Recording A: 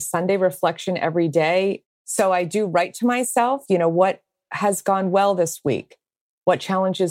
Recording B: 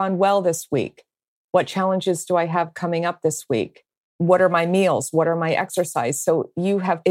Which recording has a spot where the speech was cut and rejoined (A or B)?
A